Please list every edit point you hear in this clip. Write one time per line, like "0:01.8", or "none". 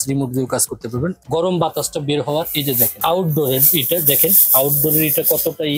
0:01.2
0:03.0